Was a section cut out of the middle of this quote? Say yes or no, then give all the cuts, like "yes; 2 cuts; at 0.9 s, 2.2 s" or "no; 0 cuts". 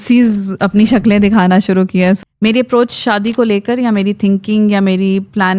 yes; 1 cut; at 2.2 s